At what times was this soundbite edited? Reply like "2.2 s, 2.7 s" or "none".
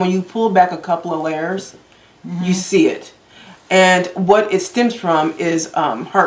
none